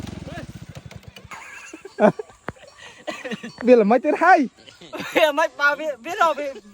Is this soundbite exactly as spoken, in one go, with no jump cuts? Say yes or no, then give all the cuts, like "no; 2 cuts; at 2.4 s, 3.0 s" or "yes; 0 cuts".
no; 1 cut; at 1.3 s